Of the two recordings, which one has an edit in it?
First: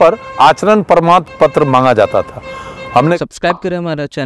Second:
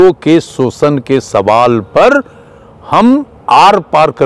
first; 1 cut; at 3.1 s

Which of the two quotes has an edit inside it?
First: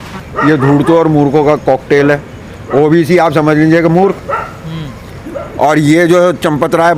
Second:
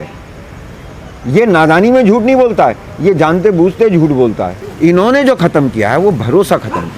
second; 1 cut; at 4.5 s

